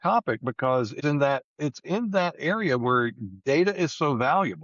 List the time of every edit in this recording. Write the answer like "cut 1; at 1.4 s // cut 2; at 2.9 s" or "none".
cut 1; at 1.0 s